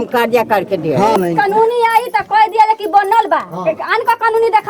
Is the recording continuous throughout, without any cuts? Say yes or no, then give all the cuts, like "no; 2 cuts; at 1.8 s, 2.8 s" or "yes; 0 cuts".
no; 1 cut; at 1.1 s